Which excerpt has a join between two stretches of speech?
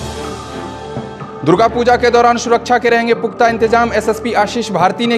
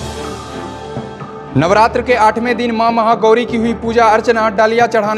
first; 1 cut; at 1.3 s

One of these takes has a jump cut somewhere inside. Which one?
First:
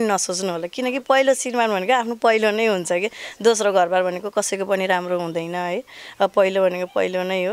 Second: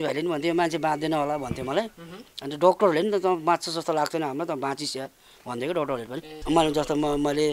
second; 1 cut; at 6.3 s

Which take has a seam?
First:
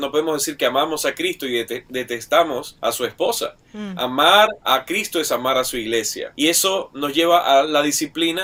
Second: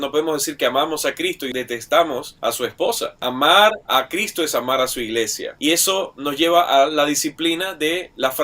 second; 2 cuts; at 1.4 s, 3.2 s

